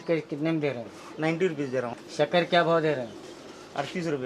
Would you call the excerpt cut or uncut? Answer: cut